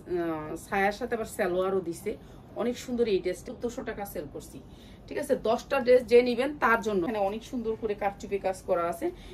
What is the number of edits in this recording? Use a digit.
2